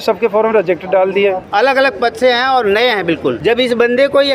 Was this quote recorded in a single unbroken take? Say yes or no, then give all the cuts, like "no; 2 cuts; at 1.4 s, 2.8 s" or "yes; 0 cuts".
no; 2 cuts; at 1.4 s, 3.4 s